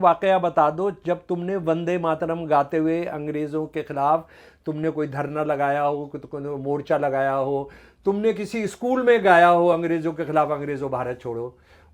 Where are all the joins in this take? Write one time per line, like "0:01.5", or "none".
none

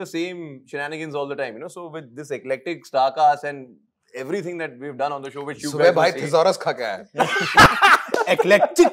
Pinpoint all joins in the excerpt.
none

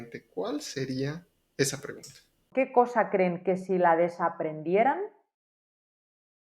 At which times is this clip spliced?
0:02.5

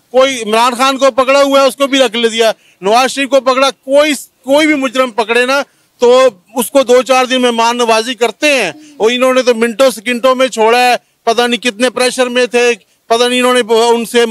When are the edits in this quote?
none

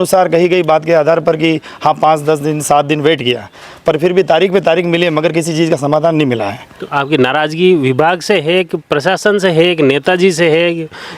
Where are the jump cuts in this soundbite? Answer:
none

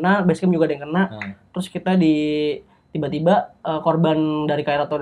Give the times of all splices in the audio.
none

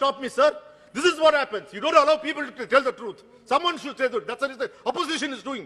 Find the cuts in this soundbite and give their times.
none

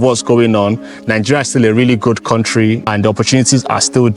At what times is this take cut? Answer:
0:02.8

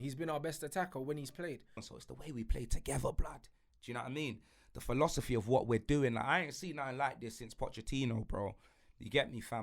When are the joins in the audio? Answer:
0:01.9

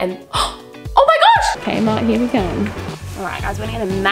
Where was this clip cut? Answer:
0:01.6

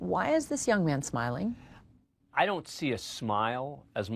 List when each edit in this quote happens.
none

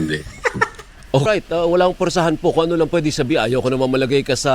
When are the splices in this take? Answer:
0:01.2

